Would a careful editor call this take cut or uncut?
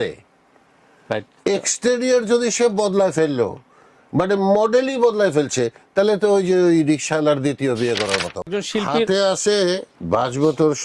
cut